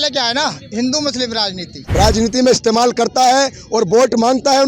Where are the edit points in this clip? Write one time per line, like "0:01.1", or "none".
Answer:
0:01.8